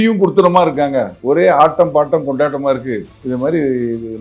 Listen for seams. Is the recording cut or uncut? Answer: cut